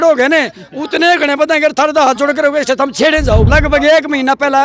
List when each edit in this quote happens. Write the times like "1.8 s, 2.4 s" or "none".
3.5 s